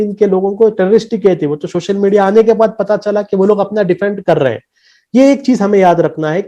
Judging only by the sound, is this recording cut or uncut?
uncut